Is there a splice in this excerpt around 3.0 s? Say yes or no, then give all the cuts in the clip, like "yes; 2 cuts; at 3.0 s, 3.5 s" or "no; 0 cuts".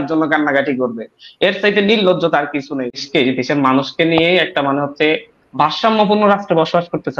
yes; 1 cut; at 3.0 s